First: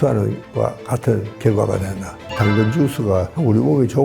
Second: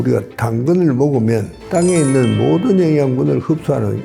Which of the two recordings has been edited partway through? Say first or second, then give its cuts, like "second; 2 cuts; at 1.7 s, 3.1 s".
first; 2 cuts; at 1.3 s, 2.3 s